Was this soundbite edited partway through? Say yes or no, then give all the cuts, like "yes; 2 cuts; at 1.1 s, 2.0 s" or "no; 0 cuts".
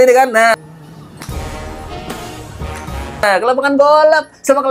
no; 0 cuts